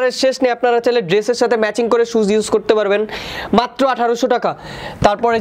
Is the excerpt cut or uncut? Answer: uncut